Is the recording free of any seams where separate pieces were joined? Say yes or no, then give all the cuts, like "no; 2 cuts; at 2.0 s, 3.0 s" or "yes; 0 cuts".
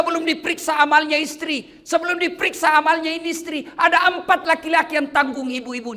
yes; 0 cuts